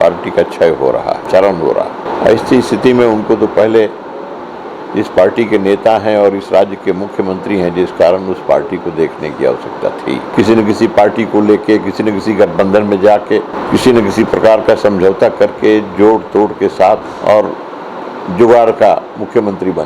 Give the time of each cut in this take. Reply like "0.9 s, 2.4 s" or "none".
1.2 s, 2.0 s, 10.3 s, 13.6 s, 17.1 s